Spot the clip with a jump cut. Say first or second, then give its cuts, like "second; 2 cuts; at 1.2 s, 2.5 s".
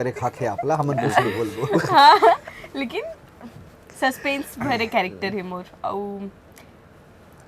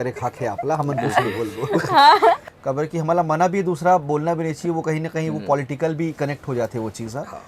second; 1 cut; at 2.5 s